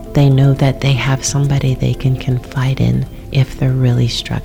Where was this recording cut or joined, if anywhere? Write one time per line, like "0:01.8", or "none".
0:03.2